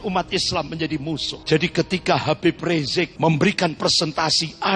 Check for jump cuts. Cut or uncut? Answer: cut